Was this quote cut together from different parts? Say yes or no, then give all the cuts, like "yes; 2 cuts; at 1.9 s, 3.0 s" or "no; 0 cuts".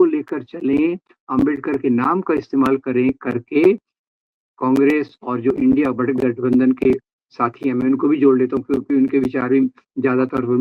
no; 0 cuts